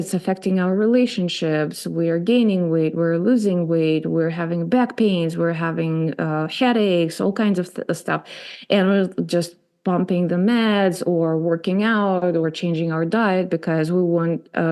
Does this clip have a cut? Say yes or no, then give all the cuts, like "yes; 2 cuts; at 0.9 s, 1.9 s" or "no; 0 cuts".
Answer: no; 0 cuts